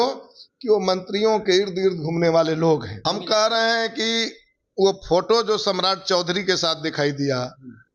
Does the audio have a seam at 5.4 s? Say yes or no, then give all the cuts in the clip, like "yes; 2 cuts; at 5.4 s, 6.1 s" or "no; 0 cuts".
no; 1 cut; at 2.9 s